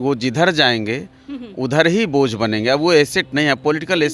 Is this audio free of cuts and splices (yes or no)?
yes